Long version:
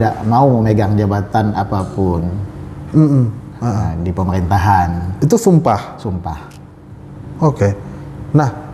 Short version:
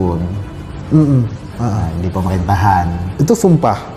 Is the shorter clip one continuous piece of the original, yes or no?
yes